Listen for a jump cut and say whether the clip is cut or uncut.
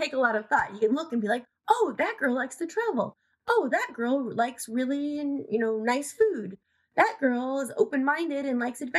uncut